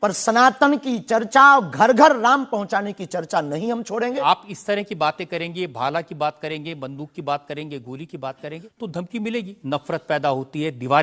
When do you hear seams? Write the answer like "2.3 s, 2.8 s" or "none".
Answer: 4.2 s, 8.7 s, 9.5 s